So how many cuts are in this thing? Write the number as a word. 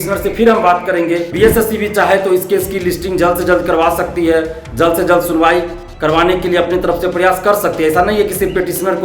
one